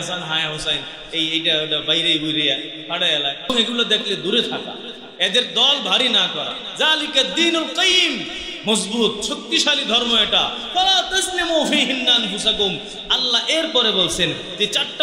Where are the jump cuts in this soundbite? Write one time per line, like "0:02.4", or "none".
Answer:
0:03.5
0:06.6